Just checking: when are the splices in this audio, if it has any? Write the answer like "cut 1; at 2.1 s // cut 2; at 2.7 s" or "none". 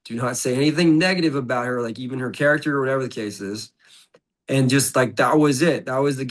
none